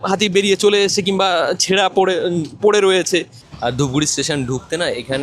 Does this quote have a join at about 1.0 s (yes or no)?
no